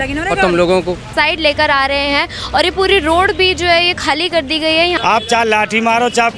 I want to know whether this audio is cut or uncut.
cut